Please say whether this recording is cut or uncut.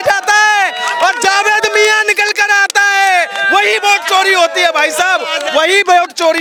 uncut